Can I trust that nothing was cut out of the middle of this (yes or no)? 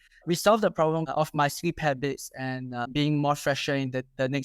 no